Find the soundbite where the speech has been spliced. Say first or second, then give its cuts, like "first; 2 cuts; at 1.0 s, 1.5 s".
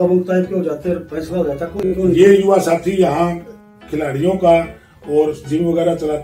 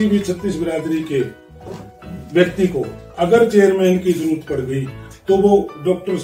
first; 1 cut; at 1.9 s